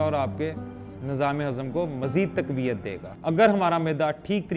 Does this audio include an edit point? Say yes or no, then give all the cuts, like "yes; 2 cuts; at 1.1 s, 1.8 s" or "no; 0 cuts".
yes; 1 cut; at 3.1 s